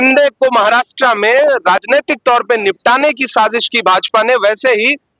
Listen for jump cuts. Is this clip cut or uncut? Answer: uncut